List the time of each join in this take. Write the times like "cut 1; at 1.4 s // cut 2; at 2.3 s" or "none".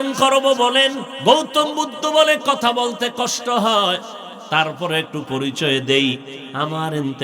cut 1; at 1.1 s